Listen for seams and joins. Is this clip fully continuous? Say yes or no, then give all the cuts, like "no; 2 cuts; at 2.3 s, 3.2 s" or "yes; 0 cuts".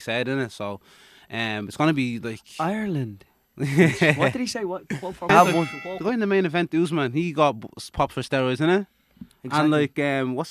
no; 1 cut; at 5.3 s